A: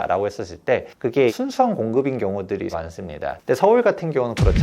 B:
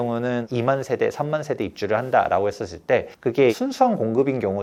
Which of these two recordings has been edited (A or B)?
A